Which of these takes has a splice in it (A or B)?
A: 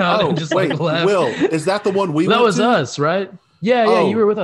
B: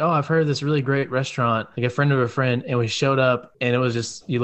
B